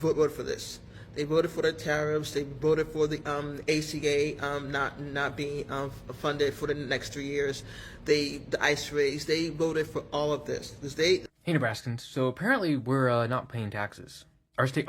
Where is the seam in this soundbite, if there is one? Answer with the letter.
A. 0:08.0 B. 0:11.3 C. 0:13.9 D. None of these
B